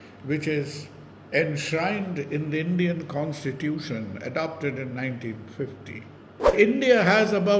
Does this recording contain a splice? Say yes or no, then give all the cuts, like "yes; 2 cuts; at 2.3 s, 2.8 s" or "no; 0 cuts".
yes; 1 cut; at 6.5 s